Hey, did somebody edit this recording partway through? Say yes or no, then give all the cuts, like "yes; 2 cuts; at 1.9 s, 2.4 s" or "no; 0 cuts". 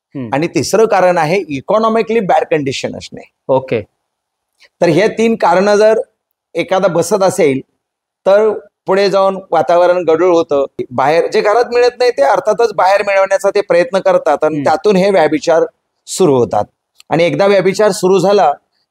no; 0 cuts